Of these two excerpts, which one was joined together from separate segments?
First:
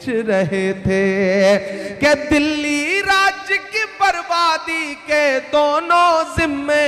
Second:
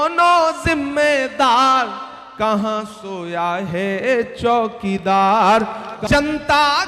second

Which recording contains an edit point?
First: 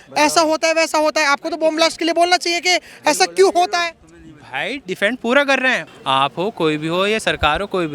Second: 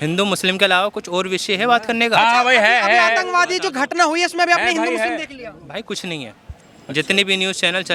first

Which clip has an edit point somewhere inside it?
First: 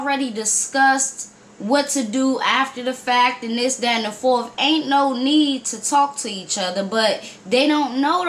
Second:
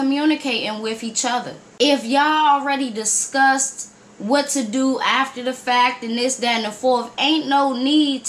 second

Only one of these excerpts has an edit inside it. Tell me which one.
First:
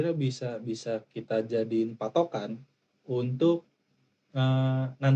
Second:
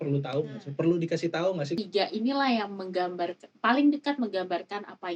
second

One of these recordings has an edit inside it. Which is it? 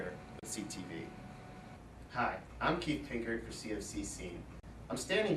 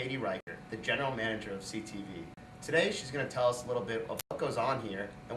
first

